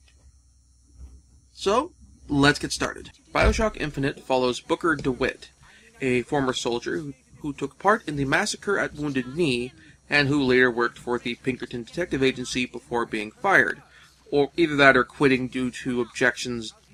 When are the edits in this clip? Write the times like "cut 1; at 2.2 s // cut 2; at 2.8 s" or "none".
none